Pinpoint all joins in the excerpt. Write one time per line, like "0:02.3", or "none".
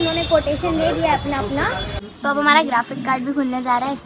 0:01.9